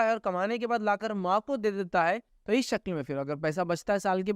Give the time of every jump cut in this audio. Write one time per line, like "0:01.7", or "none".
0:02.3